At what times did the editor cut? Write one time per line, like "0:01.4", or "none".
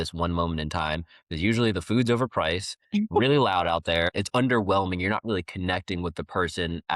0:04.1